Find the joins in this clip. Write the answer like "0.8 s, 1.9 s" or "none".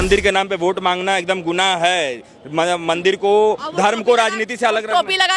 none